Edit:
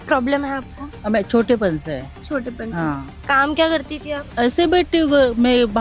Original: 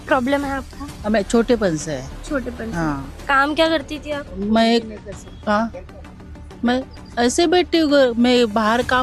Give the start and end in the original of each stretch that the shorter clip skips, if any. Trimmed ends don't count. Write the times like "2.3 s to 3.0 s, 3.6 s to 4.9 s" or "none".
4.2 s to 7.1 s

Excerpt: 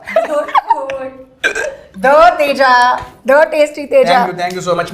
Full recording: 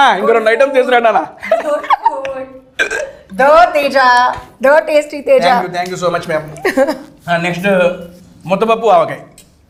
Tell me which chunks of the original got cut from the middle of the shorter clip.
none

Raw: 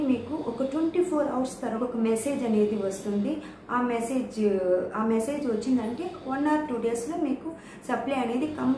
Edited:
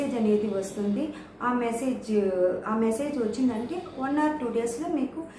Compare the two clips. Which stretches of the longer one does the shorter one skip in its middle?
none

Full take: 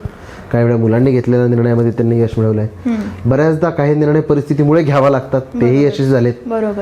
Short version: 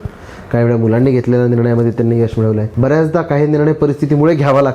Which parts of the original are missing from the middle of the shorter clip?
2.7 s to 3.2 s

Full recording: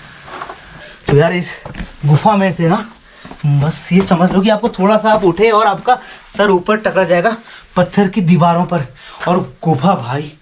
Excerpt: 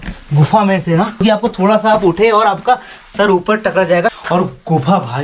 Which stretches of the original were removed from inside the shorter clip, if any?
2.9 s to 4.4 s, 7.4 s to 9.2 s

